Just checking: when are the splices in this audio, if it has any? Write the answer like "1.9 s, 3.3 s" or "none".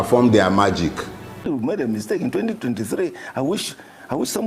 1.4 s